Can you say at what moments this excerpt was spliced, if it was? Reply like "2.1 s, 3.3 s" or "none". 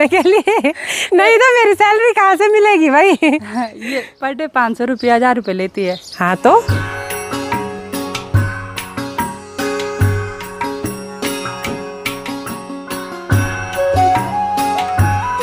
none